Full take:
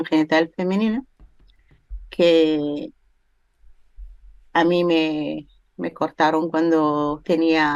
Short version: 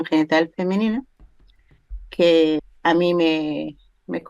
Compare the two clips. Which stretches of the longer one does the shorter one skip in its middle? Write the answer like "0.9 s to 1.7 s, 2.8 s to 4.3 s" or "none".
2.6 s to 4.3 s